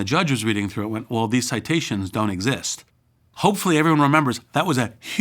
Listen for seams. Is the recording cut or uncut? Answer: cut